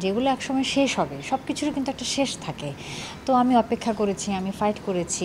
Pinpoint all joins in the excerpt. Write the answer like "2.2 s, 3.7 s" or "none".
none